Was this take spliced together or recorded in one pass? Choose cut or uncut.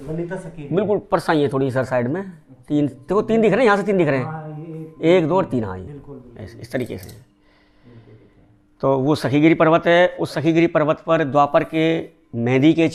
uncut